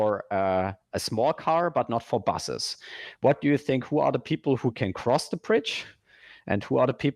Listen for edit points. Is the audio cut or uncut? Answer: uncut